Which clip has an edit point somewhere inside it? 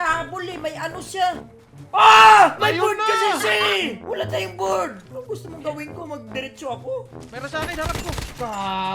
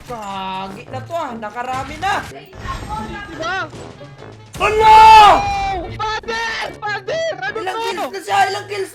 first; 1 cut; at 7.3 s

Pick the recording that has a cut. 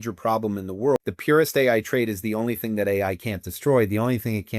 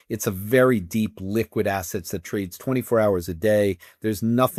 first; 1 cut; at 1.0 s

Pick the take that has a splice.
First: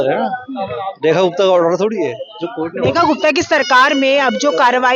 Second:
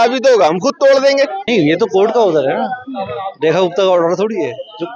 second; 1 cut; at 1.4 s

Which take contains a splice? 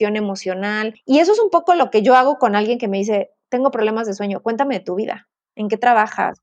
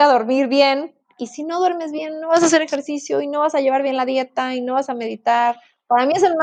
first; 1 cut; at 1.0 s

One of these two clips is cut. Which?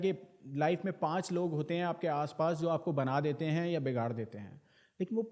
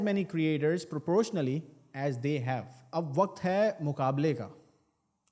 second; 1 cut; at 2.9 s

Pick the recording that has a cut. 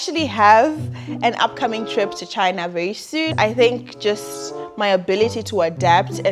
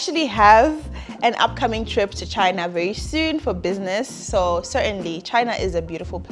first; 1 cut; at 3.3 s

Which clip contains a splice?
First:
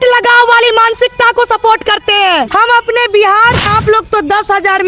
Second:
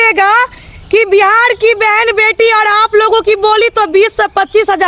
first; 2 cuts; at 2.5 s, 3.6 s

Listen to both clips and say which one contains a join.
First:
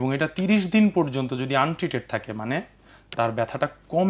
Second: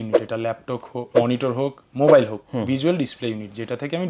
second; 1 cut; at 1.1 s

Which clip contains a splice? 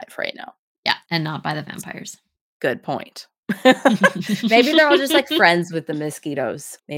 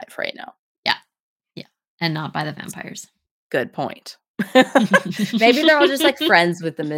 first; 1 cut; at 1.0 s

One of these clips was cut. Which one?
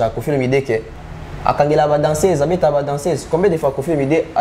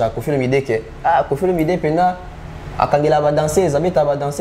first; 1 cut; at 0.9 s

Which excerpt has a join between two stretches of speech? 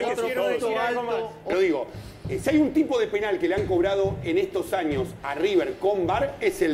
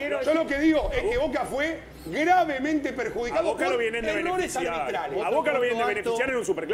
first; 1 cut; at 1.4 s

